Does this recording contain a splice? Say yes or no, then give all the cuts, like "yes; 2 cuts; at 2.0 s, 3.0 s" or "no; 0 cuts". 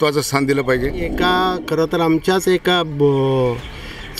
yes; 1 cut; at 1.1 s